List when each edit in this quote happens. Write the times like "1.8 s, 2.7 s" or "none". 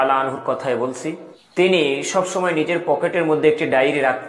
1.3 s

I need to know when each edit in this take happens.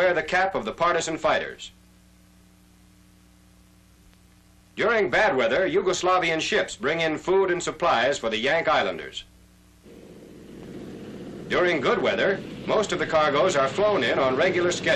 none

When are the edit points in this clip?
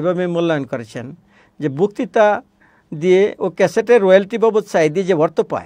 none

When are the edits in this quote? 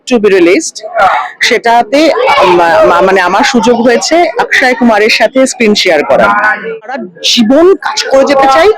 6.7 s

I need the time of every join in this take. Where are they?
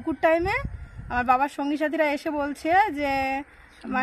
none

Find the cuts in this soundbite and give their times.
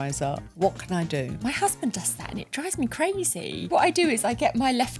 1.3 s, 3.7 s

